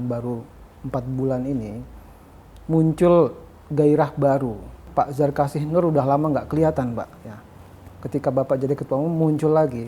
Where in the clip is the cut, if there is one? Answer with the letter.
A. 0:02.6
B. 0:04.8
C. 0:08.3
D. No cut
B